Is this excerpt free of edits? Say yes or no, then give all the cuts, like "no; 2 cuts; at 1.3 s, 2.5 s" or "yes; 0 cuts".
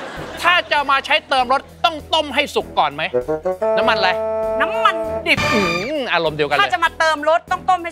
yes; 0 cuts